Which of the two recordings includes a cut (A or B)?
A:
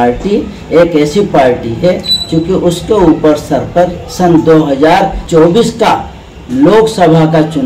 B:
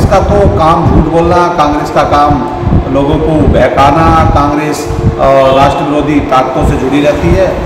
A